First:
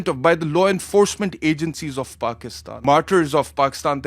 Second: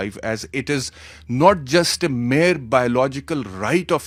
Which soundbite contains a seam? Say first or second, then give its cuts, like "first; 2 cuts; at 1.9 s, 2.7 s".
first; 1 cut; at 2.8 s